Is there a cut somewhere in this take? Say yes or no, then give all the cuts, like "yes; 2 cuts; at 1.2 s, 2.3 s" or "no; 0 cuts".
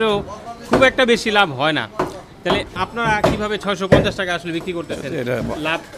yes; 1 cut; at 2.9 s